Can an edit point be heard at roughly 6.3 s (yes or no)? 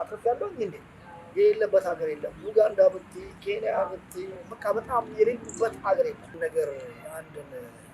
yes